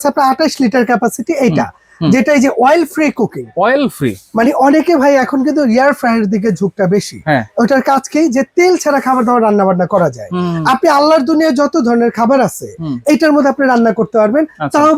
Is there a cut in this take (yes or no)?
no